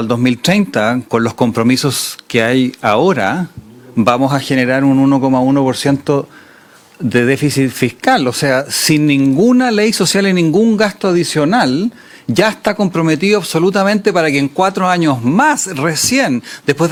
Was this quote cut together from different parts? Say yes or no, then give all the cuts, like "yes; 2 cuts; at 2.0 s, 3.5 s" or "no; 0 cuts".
no; 0 cuts